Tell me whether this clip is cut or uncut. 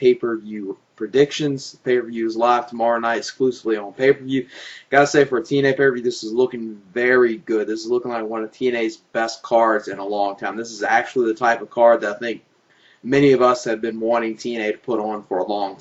uncut